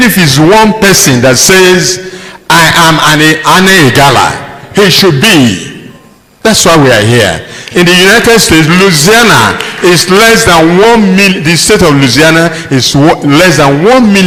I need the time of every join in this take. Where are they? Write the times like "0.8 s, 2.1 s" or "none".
none